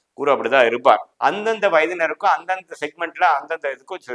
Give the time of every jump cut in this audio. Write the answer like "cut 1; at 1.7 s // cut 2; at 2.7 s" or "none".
cut 1; at 1.1 s